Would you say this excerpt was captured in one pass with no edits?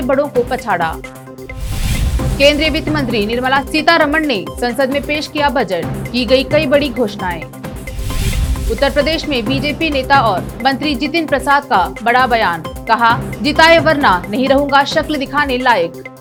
yes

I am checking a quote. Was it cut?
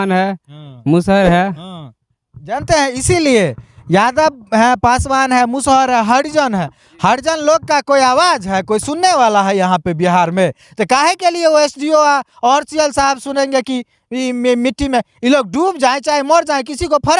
no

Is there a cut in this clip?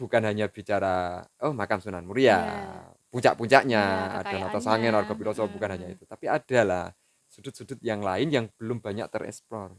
no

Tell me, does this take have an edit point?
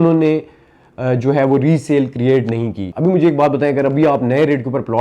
yes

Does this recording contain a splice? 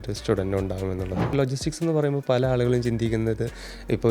yes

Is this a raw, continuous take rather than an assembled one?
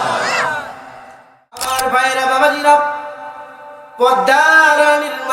no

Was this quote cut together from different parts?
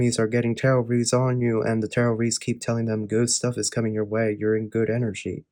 no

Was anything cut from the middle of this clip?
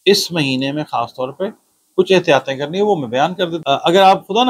yes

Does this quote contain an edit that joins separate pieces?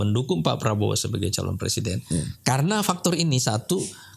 no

